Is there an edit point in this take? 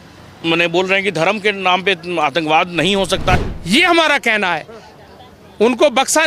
yes; 1 cut; at 3.3 s

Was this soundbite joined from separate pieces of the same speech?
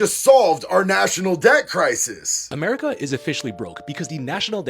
yes; 1 cut; at 2.5 s

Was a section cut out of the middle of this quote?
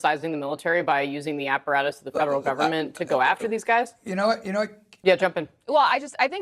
yes; 1 cut; at 4.8 s

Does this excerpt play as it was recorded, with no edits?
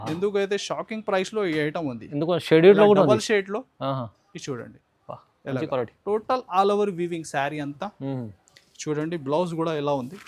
yes; 0 cuts

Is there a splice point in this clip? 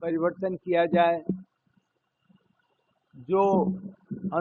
no; 0 cuts

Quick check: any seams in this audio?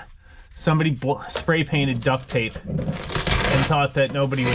no; 0 cuts

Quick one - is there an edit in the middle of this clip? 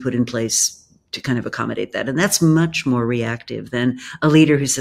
no; 0 cuts

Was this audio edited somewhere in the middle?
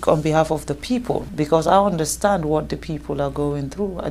yes; 1 cut; at 1.3 s

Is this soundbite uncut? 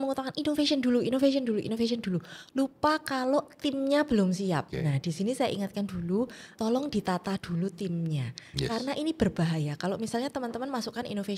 no; 2 cuts; at 4.7 s, 6.6 s

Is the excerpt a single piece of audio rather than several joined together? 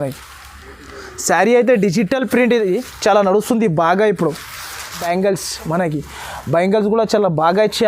no; 1 cut; at 5.0 s

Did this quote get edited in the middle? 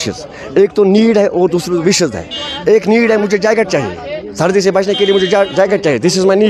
no; 0 cuts

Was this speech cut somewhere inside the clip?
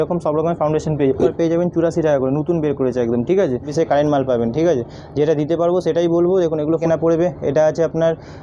yes; 3 cuts; at 1.3 s, 3.7 s, 6.8 s

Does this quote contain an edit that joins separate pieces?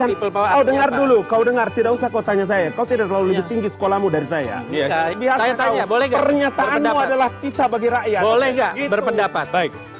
yes; 1 cut; at 5.1 s

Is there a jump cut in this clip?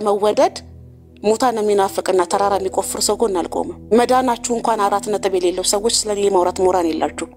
yes; 1 cut; at 3.8 s

